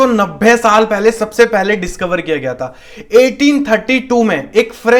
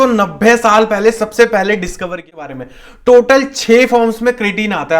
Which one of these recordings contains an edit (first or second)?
second